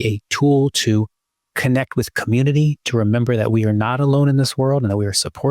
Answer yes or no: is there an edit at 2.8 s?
no